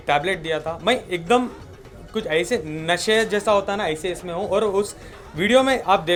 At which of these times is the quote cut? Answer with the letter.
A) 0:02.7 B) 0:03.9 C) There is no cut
C